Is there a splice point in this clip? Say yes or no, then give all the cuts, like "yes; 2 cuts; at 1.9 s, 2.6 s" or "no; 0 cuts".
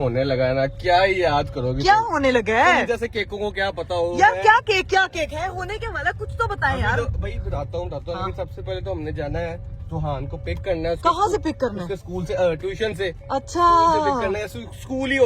no; 0 cuts